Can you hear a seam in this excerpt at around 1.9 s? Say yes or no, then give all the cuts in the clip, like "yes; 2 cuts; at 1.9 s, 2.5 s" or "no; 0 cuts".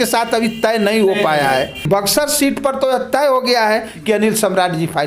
yes; 1 cut; at 1.9 s